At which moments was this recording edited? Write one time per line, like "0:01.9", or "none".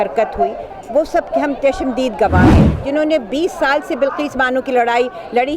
0:02.7

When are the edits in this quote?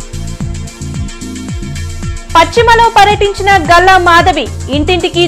0:01.3

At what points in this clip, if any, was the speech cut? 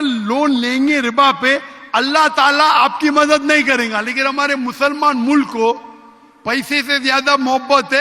none

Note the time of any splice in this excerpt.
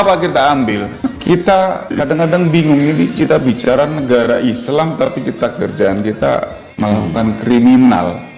0:01.8

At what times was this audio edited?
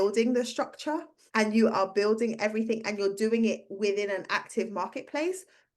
0:01.1

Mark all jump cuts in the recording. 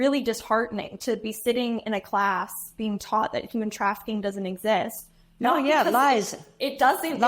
none

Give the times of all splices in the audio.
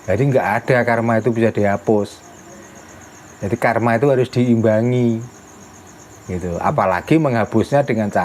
none

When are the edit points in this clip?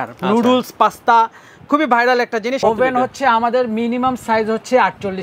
0:02.6

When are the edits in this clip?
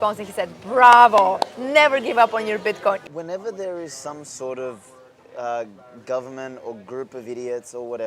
0:03.0

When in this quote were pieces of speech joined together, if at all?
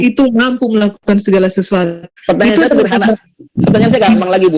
0:02.1

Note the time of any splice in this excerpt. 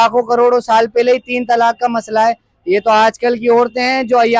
none

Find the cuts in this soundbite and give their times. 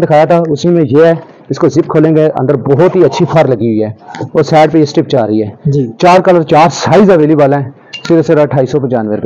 none

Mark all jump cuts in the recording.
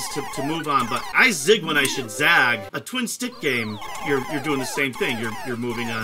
0:01.1
0:02.7

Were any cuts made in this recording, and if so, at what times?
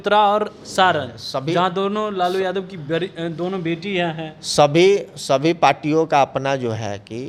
none

